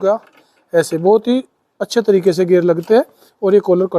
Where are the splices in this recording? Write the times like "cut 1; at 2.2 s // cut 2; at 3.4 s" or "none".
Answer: none

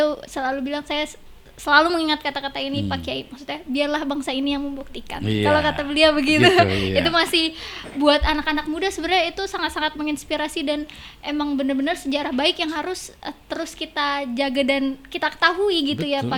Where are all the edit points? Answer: none

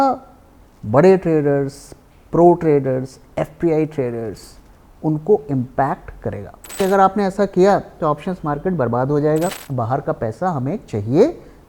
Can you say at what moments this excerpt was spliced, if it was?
cut 1; at 6.8 s // cut 2; at 9.6 s

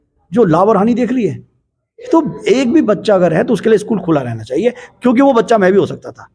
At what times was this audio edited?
none

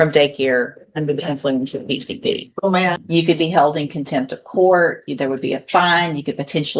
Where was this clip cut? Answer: cut 1; at 3.0 s

